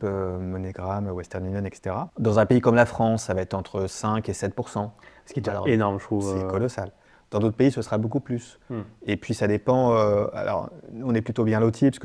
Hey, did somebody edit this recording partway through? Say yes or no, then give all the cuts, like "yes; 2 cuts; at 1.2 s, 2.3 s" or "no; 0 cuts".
yes; 1 cut; at 2.1 s